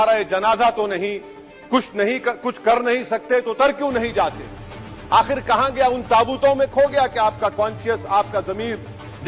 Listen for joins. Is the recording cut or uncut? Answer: uncut